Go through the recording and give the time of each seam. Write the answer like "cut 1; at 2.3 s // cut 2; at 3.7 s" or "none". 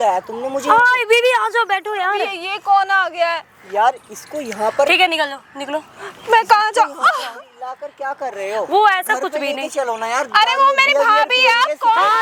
none